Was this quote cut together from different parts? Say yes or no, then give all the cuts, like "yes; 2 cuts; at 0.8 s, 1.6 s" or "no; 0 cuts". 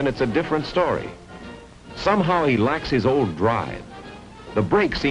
yes; 1 cut; at 2.9 s